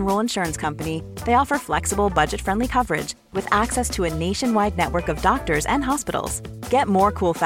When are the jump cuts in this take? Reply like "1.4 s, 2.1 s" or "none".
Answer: none